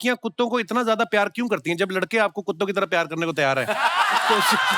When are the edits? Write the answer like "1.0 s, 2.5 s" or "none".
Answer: none